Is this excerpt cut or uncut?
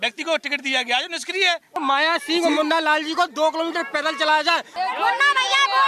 cut